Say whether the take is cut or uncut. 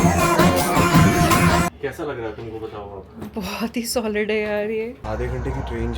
cut